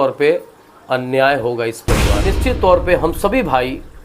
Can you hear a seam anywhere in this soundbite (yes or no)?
yes